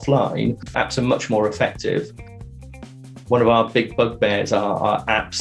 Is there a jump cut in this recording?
yes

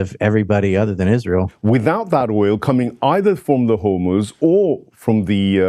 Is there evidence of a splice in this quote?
yes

